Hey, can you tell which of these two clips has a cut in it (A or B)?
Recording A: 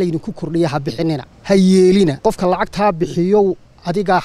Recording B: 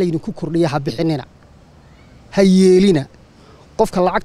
A